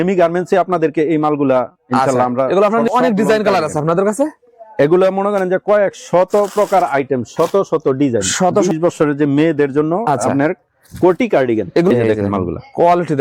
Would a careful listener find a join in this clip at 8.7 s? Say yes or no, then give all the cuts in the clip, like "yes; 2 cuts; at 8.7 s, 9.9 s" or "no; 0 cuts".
yes; 3 cuts; at 2.9 s, 8.7 s, 11.9 s